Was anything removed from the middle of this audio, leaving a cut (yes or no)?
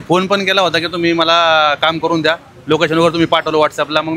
no